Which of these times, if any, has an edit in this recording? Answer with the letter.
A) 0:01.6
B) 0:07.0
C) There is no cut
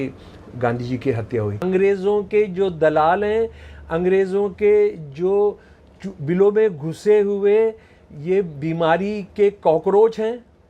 A